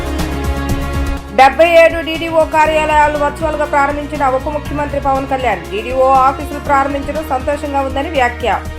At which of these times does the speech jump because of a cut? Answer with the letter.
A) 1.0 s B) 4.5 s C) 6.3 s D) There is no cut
A